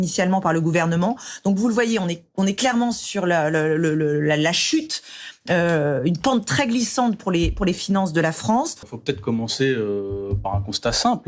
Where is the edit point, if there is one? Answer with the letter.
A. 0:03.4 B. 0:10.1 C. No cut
B